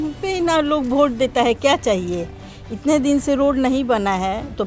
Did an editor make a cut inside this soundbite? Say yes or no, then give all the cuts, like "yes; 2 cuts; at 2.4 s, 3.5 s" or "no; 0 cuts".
no; 0 cuts